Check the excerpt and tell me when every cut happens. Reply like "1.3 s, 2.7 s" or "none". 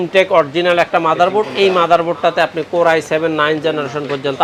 none